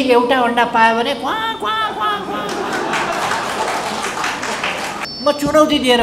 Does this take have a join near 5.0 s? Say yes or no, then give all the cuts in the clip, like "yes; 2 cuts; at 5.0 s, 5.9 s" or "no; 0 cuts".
yes; 1 cut; at 5.0 s